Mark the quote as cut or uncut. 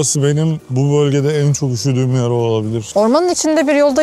cut